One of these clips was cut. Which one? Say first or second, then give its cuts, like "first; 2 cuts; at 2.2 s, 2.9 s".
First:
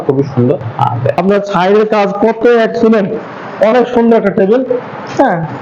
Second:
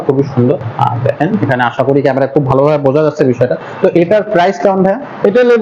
first; 1 cut; at 1.2 s